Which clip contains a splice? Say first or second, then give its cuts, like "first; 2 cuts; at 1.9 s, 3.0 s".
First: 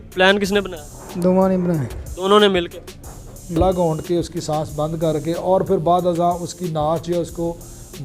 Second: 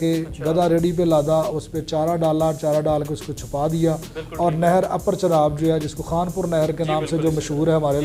first; 1 cut; at 3.6 s